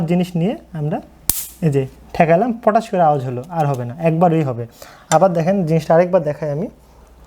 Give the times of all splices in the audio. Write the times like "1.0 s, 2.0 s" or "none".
none

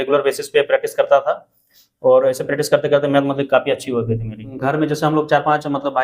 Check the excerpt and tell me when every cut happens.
4.5 s

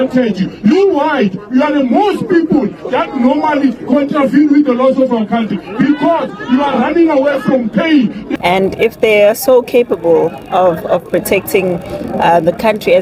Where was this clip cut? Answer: 8.3 s

